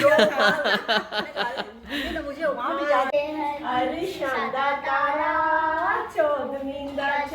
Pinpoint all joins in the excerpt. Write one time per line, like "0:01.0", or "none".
0:03.1